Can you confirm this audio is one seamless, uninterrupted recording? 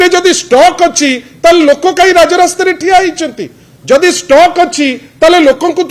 yes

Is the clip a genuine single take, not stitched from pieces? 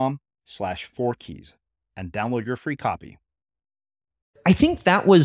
no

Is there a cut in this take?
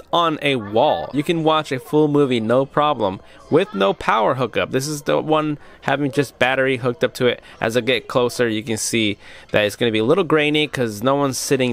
no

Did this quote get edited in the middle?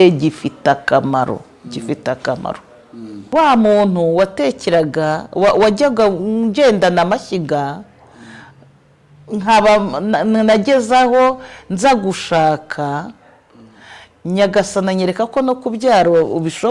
yes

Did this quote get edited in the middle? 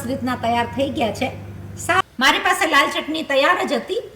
yes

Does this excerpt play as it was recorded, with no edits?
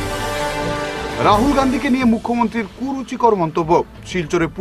no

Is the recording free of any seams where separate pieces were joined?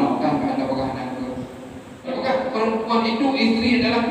no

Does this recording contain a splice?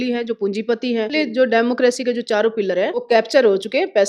yes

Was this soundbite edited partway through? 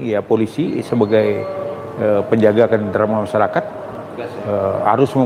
no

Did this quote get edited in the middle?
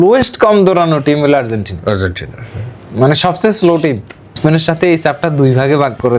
yes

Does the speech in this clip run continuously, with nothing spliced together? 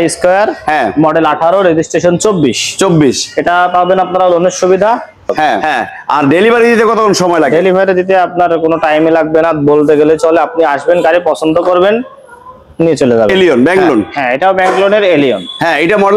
no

